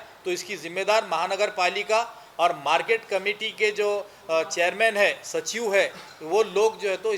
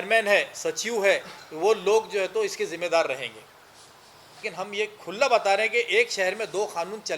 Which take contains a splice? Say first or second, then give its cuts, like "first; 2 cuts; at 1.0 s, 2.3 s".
second; 1 cut; at 4.4 s